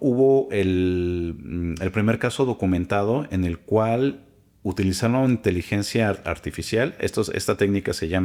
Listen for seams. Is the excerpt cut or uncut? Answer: uncut